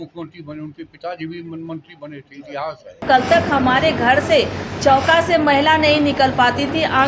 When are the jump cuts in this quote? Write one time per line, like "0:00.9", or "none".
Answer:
0:03.0